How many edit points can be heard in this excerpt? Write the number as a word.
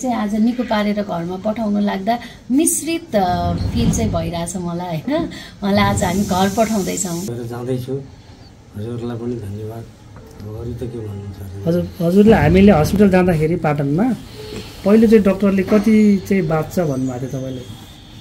one